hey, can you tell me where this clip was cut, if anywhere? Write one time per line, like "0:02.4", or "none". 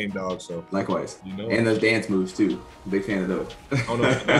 0:01.2